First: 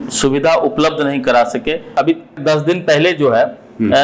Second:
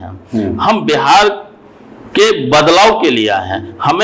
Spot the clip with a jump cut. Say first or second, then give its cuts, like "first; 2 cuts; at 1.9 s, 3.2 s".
first; 1 cut; at 2.3 s